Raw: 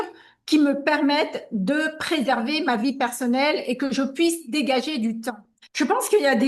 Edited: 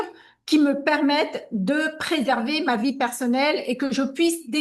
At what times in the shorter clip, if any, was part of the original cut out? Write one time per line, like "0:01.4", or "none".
none